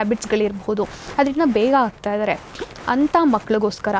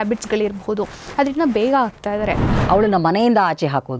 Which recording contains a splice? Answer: second; 1 cut; at 2.5 s

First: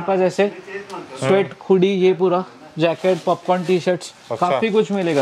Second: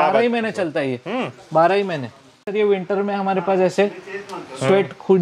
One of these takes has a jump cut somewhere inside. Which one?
second; 1 cut; at 2.5 s

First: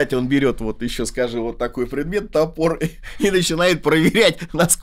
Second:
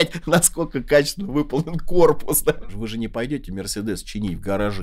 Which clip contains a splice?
second; 1 cut; at 2.7 s

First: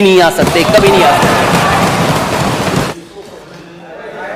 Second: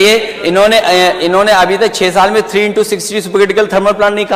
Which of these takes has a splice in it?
first; 1 cut; at 2.9 s

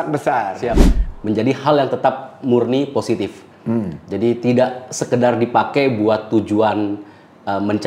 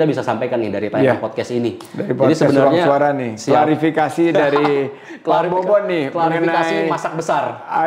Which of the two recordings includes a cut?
first; 2 cuts; at 1.0 s, 3.4 s

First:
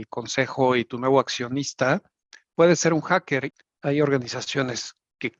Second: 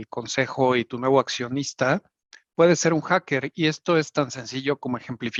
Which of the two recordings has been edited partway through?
first; 1 cut; at 3.5 s

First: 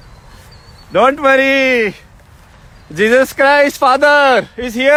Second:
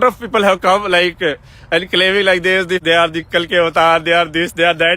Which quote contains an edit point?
second; 1 cut; at 2.8 s

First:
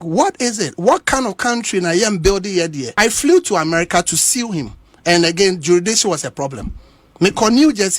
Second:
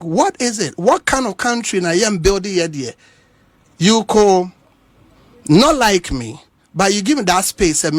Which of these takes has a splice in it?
first; 1 cut; at 2.8 s

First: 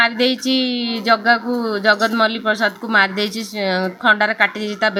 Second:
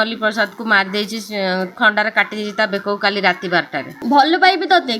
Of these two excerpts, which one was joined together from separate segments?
second; 1 cut; at 4.0 s

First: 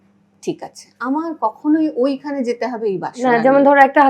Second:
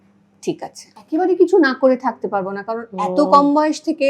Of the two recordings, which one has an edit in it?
second; 1 cut; at 0.9 s

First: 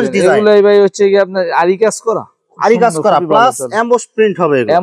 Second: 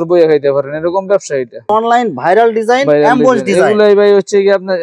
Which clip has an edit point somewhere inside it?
second; 1 cut; at 1.7 s

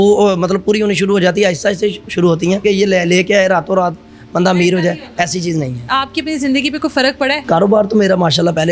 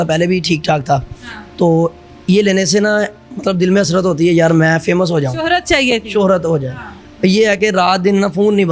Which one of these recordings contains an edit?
first; 3 cuts; at 2.6 s, 5.9 s, 7.4 s

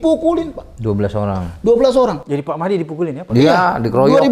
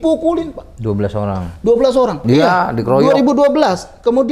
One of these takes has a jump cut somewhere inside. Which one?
second; 1 cut; at 2.2 s

